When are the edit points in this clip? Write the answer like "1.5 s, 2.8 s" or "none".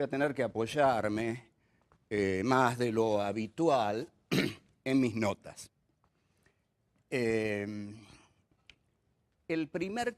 8.2 s